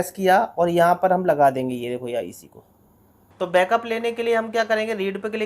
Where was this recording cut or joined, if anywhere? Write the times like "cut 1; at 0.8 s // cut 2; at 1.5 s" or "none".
cut 1; at 2.8 s